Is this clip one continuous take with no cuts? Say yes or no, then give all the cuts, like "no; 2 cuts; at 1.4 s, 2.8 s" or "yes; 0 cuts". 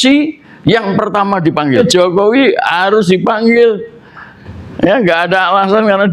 no; 1 cut; at 1.8 s